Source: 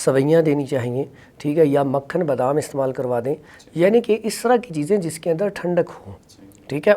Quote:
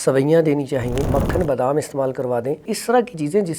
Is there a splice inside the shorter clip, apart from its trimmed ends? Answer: yes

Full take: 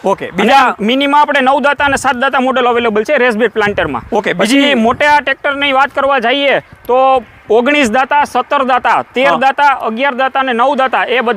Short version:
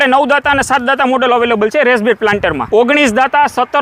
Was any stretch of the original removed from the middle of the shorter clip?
yes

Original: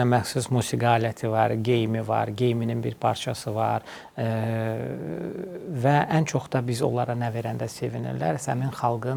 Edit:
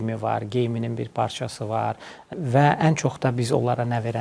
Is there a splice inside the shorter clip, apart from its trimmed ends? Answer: yes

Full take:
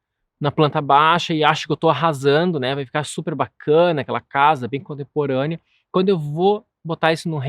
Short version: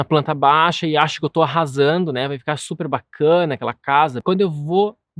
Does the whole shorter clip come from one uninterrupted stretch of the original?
no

